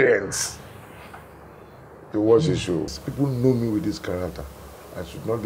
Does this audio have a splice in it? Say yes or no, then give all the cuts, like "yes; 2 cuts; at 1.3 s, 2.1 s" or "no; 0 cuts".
yes; 1 cut; at 2.9 s